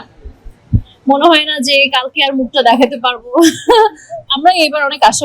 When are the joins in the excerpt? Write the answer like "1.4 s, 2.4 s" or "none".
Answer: 4.2 s